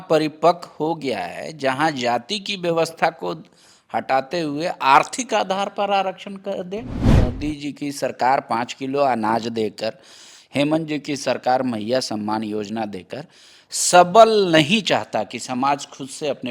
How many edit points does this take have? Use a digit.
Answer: 1